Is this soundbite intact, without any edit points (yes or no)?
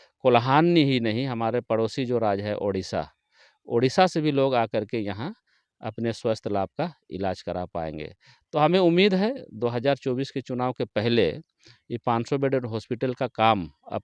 yes